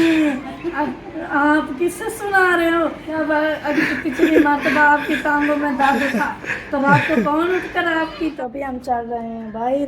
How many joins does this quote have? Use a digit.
2